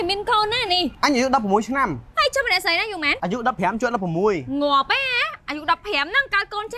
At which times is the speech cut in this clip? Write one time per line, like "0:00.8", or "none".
0:00.9
0:03.1